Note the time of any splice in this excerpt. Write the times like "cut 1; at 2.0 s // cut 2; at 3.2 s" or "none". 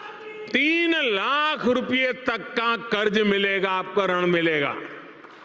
none